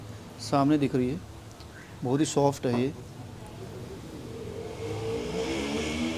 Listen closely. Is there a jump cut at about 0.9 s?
no; 0 cuts

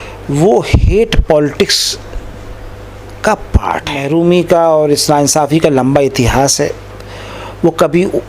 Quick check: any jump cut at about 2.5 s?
no; 1 cut; at 4.0 s

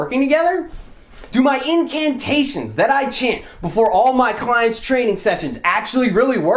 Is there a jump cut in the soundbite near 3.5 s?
no; 1 cut; at 1.2 s

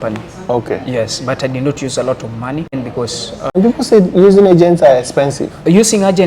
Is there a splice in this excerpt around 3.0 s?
yes; 1 cut; at 3.0 s

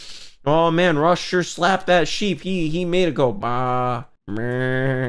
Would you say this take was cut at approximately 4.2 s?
yes; 1 cut; at 4.2 s

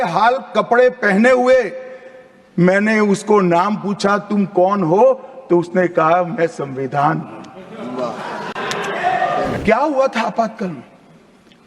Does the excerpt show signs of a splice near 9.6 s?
yes; 1 cut; at 9.6 s

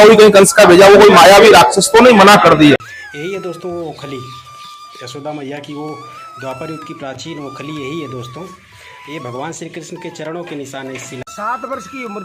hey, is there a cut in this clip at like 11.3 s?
yes; 2 cuts; at 2.9 s, 11.3 s

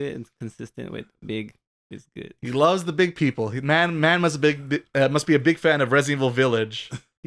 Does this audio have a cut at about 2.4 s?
no; 0 cuts

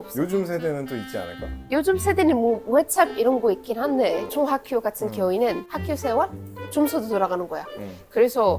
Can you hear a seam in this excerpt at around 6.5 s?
no; 1 cut; at 4.3 s

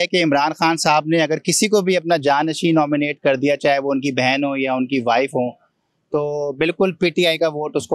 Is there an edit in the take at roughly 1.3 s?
no; 0 cuts

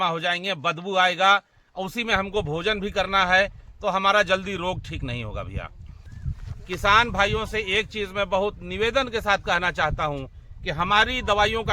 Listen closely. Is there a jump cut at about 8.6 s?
no; 1 cut; at 6.2 s

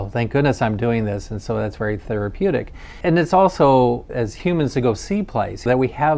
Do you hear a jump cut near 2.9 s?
no; 0 cuts

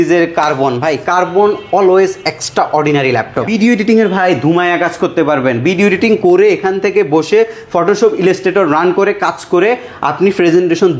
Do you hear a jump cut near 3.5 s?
yes; 1 cut; at 3.5 s

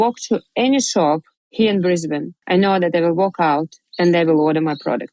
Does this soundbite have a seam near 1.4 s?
yes; 2 cuts; at 1.4 s, 2.3 s

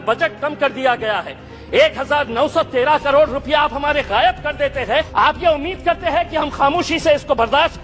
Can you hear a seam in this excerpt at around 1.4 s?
no; 1 cut; at 5.1 s

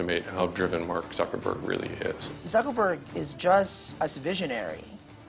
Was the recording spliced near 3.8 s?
yes; 2 cuts; at 2.3 s, 3.8 s

